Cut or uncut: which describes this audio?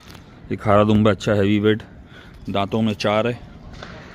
uncut